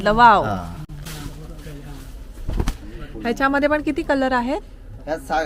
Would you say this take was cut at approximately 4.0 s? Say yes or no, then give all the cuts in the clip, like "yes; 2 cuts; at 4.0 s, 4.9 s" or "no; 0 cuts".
no; 1 cut; at 1.0 s